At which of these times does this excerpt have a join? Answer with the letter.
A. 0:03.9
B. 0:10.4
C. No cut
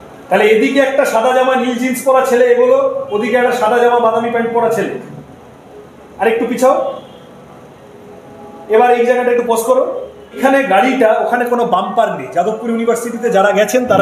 B